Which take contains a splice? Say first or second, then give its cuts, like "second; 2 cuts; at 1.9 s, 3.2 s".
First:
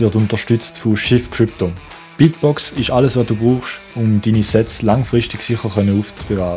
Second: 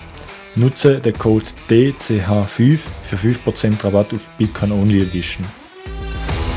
second; 1 cut; at 5.4 s